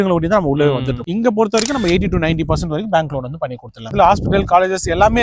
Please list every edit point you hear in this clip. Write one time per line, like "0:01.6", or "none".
0:01.0
0:03.9